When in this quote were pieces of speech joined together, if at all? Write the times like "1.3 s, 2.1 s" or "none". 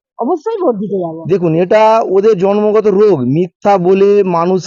1.2 s